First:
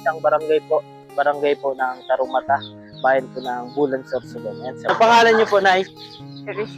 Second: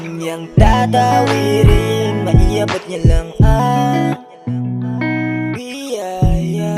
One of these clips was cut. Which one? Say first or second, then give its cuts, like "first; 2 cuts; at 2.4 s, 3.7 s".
first; 1 cut; at 4.9 s